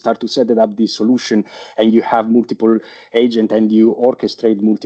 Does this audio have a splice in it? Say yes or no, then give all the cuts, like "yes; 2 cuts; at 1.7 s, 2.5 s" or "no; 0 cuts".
no; 0 cuts